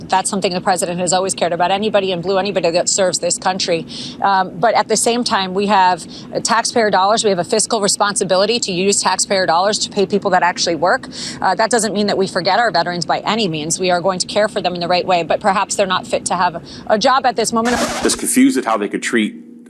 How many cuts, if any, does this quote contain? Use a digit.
1